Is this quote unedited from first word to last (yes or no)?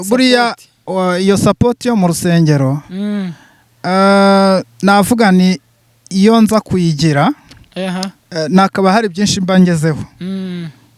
yes